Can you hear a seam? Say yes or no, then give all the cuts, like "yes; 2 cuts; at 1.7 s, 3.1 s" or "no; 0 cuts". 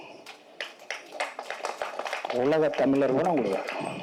no; 0 cuts